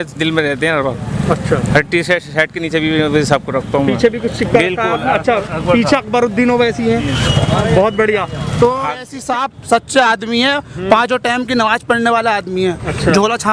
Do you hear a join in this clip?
yes; 1 cut; at 9.1 s

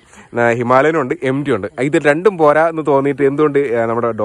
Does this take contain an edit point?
no; 0 cuts

